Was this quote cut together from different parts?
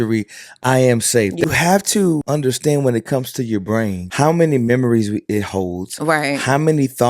yes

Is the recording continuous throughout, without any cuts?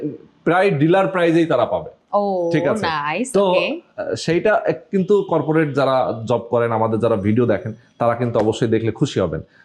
yes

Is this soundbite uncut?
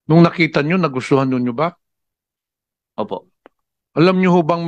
yes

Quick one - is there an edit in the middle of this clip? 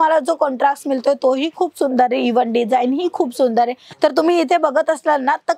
yes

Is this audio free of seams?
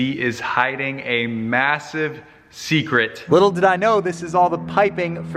no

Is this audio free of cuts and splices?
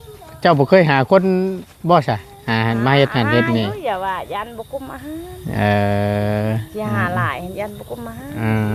yes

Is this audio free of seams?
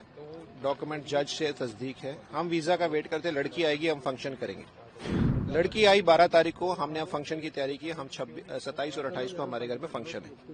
yes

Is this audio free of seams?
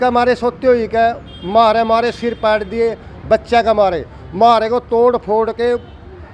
yes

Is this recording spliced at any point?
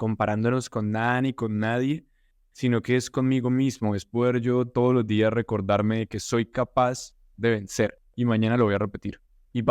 no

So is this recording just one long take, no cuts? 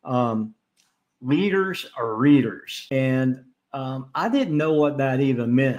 no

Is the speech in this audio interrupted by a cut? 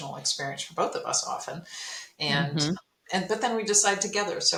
no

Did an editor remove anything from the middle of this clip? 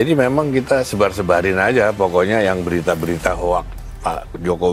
no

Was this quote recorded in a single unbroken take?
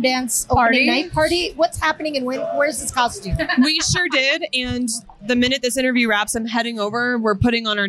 yes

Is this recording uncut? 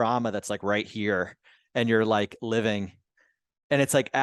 yes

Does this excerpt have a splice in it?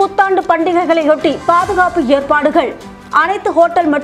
no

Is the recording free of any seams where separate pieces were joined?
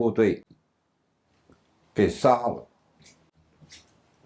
yes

